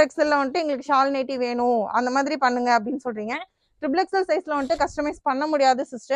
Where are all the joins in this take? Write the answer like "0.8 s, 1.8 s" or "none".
none